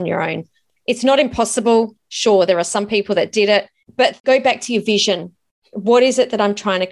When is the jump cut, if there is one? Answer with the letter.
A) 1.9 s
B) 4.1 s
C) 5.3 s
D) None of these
B